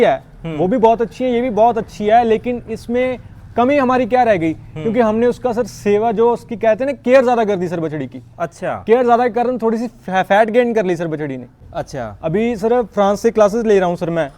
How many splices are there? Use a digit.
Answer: 1